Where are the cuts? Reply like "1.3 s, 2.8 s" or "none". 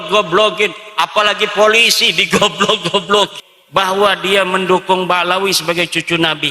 3.3 s